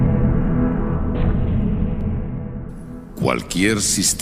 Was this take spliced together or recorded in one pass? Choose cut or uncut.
cut